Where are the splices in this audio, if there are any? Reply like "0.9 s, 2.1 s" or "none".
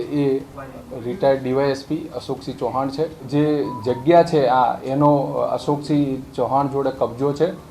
3.2 s

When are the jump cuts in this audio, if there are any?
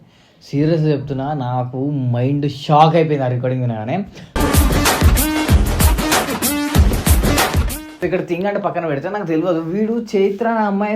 7.8 s

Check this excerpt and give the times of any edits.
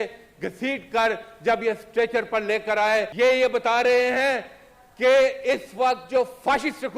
3.1 s

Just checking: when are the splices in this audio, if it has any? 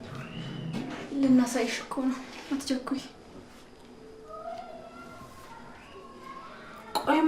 none

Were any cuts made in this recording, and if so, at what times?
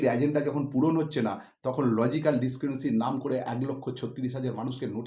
none

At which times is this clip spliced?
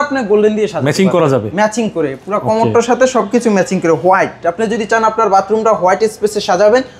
none

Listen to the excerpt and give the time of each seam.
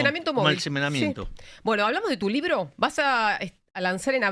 none

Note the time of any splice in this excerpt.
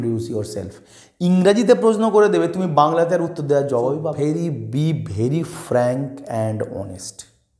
4.2 s

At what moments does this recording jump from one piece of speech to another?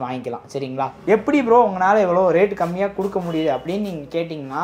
1.0 s

